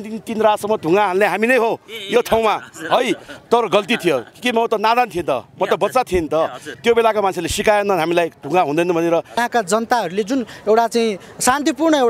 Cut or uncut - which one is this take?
cut